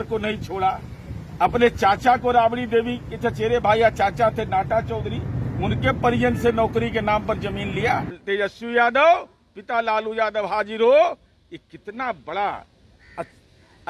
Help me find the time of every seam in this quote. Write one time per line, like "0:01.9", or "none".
0:08.1